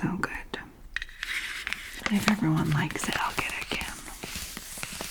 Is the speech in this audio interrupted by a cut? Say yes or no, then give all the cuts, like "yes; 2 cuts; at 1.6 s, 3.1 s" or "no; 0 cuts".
yes; 1 cut; at 1.9 s